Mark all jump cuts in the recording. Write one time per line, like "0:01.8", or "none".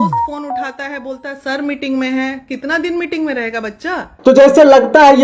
none